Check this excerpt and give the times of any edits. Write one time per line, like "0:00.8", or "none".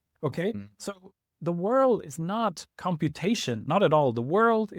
none